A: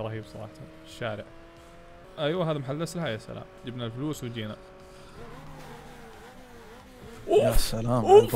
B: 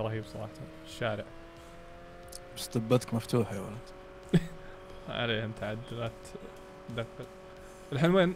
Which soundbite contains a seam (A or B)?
A